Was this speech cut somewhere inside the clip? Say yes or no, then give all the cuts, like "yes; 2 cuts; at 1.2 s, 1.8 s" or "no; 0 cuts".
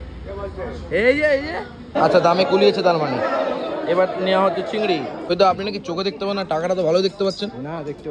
yes; 2 cuts; at 1.9 s, 5.2 s